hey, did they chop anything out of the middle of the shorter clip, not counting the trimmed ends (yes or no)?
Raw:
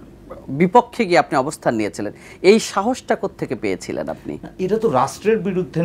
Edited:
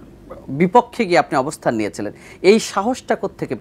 no